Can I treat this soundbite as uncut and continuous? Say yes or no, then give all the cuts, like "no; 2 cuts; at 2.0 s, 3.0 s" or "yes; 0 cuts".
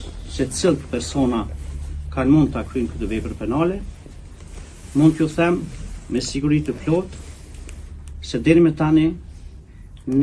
yes; 0 cuts